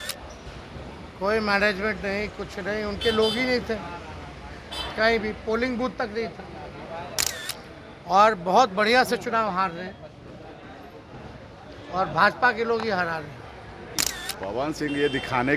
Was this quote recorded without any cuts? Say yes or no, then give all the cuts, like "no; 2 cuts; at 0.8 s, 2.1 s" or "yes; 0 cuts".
no; 1 cut; at 14.0 s